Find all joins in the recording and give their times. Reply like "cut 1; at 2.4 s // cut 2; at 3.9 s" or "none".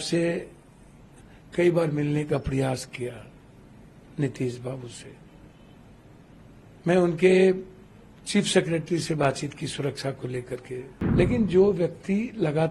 cut 1; at 11.0 s

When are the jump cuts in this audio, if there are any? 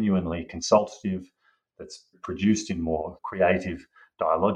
cut 1; at 2.2 s // cut 2; at 3.2 s

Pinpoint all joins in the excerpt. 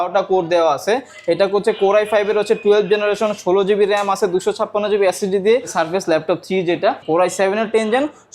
cut 1; at 5.7 s // cut 2; at 7.0 s

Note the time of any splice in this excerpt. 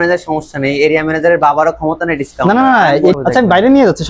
cut 1; at 3.2 s

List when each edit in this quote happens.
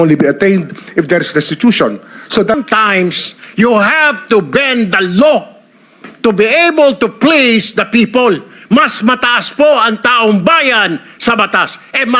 cut 1; at 2.6 s

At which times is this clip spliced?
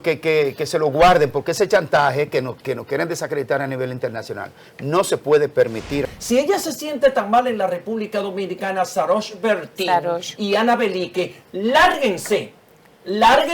cut 1; at 6.0 s

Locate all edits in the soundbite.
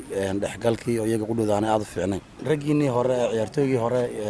cut 1; at 2.4 s

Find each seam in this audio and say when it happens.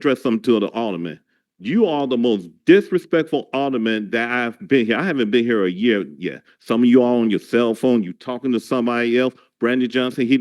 none

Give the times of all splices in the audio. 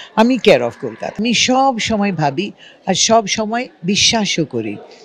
cut 1; at 1.2 s

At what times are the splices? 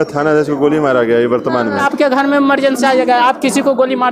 cut 1; at 1.8 s

